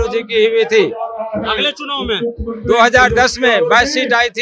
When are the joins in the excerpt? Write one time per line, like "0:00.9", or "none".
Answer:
none